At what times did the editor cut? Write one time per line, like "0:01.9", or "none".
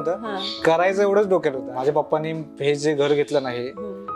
0:01.7